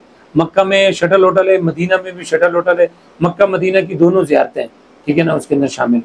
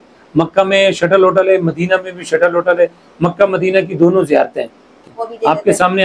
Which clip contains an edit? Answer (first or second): second